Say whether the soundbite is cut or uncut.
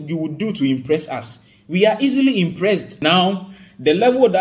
cut